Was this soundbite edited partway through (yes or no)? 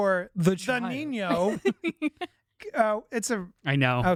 no